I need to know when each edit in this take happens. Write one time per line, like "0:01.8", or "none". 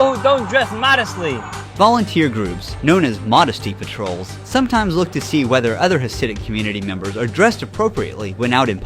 0:01.6